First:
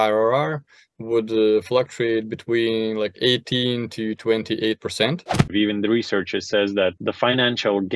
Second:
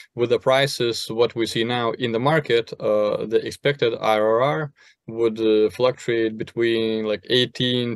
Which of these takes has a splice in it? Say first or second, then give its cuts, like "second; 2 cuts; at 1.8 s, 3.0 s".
first; 2 cuts; at 5.5 s, 7.0 s